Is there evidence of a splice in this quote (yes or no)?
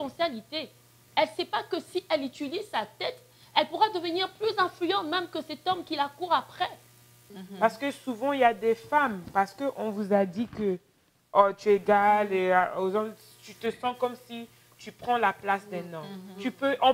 yes